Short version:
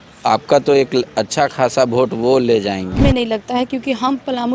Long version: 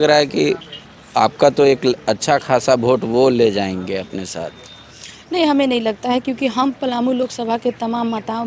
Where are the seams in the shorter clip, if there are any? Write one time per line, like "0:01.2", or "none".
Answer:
0:03.0